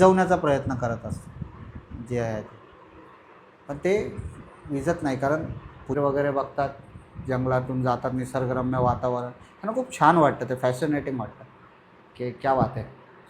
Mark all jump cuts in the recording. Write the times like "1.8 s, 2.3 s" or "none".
6.0 s